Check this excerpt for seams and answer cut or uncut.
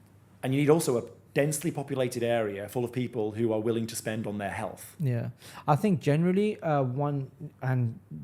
uncut